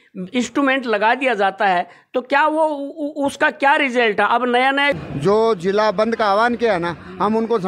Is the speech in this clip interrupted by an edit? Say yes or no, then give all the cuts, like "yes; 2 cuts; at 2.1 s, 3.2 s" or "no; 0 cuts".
yes; 1 cut; at 5.0 s